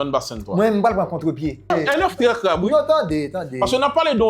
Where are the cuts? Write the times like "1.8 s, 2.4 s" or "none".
1.7 s